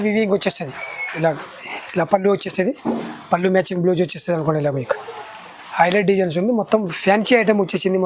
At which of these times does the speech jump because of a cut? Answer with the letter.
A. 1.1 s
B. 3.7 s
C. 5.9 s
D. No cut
A